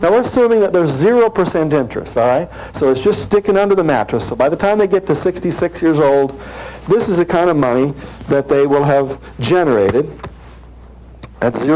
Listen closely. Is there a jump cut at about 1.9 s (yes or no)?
yes